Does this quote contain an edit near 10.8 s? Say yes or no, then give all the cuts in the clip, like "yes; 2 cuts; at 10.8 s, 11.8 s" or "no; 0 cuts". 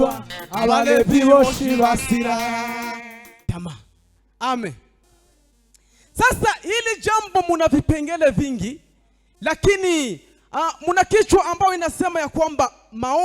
no; 1 cut; at 3.4 s